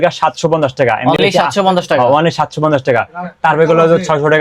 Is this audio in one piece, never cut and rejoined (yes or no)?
yes